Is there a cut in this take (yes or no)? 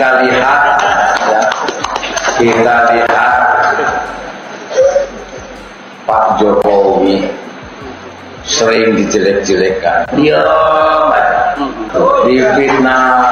yes